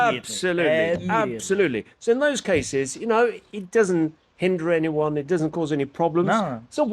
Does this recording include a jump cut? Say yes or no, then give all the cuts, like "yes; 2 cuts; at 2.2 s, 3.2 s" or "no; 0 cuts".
no; 0 cuts